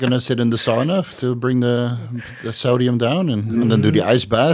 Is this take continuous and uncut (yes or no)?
no